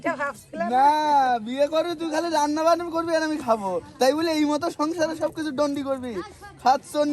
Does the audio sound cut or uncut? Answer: uncut